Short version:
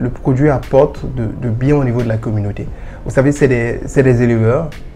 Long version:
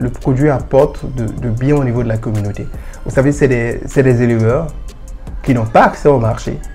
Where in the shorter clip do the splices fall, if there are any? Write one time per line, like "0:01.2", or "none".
none

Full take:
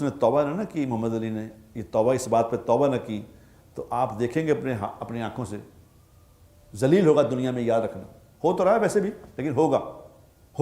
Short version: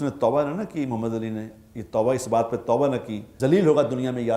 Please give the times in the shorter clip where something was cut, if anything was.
0:03.2

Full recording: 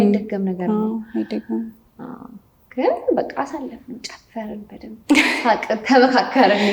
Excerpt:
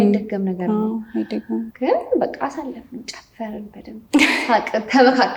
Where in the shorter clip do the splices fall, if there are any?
0:01.7

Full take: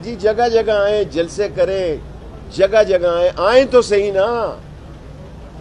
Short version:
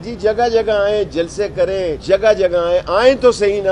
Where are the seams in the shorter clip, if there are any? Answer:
0:02.0

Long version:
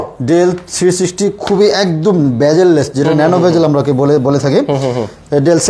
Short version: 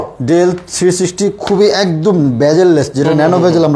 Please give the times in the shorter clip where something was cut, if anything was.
none

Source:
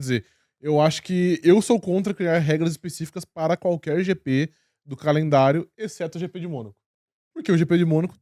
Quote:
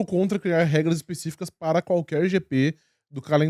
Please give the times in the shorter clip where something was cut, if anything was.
none

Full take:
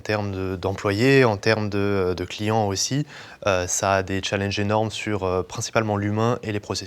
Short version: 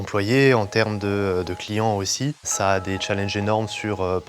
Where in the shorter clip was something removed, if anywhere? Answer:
0:02.5

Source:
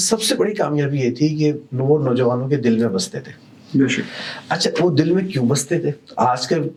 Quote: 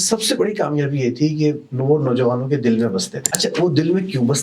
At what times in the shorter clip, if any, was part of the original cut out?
0:03.2

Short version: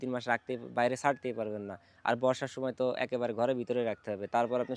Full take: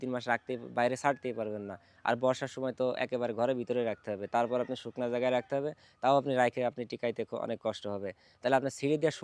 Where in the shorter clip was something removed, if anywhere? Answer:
none

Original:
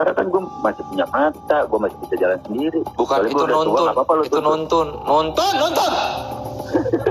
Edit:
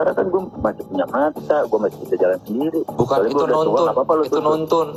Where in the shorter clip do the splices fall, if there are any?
none

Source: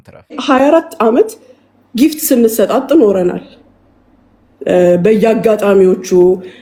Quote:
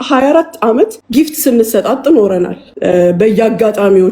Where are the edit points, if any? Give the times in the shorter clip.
0:01.0
0:02.6

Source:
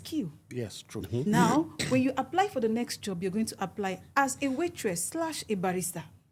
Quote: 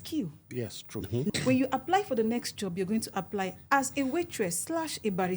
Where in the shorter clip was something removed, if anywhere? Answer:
0:01.3

